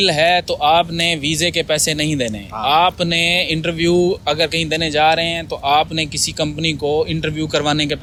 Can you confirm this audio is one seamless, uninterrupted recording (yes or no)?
yes